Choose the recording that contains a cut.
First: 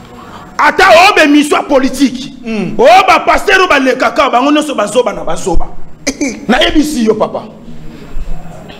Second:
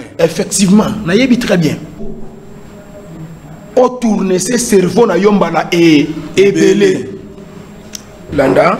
second; 1 cut; at 2.0 s

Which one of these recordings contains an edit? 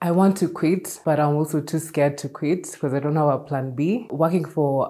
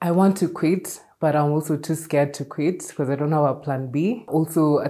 first; 2 cuts; at 0.9 s, 4.1 s

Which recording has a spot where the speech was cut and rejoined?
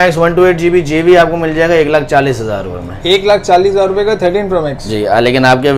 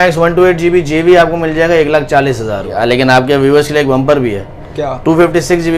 second; 1 cut; at 2.7 s

